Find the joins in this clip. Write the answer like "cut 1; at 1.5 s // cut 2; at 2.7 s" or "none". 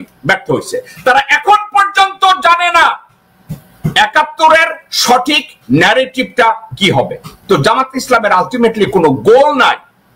cut 1; at 7.3 s